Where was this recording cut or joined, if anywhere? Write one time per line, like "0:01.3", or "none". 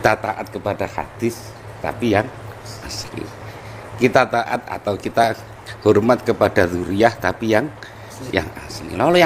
none